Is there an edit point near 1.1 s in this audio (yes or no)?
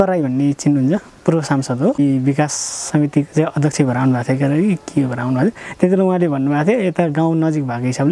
yes